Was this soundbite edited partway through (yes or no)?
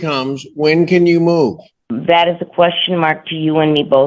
yes